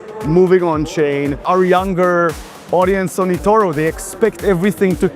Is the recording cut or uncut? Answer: cut